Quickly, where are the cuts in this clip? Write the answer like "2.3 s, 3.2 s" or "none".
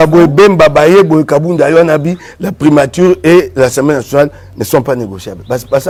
none

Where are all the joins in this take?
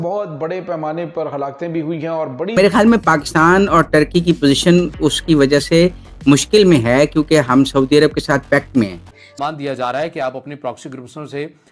2.6 s, 9.4 s

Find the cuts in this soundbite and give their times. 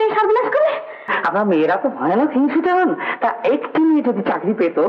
1.1 s

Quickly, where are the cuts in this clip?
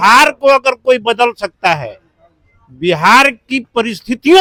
none

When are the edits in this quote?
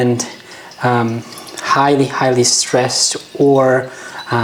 none

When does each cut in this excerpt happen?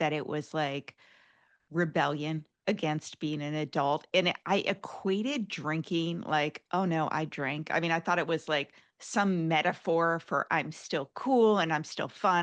none

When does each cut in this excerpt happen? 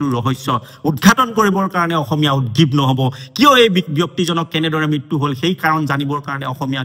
none

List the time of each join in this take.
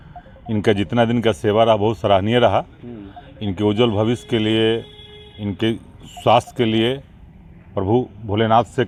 none

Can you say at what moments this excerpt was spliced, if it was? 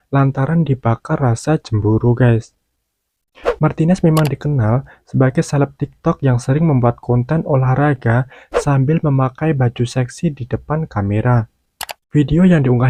none

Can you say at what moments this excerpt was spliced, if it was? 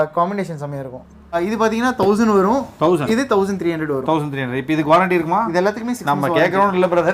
1.4 s

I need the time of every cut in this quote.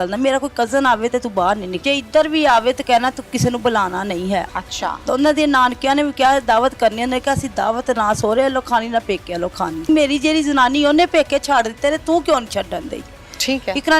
1.7 s, 4.5 s, 9.9 s

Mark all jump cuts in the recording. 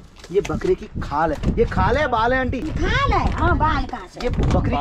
none

